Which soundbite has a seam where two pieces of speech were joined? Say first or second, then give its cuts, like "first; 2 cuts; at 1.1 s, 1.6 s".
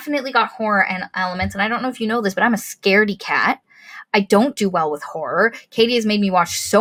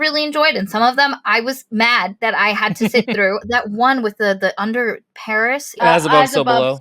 second; 3 cuts; at 2.1 s, 3.5 s, 5.8 s